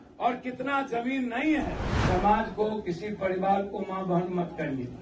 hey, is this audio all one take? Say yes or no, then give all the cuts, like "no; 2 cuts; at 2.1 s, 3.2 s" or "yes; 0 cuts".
no; 1 cut; at 1.9 s